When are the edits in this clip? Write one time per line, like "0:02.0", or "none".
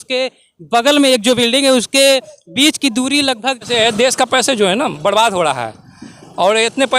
0:03.6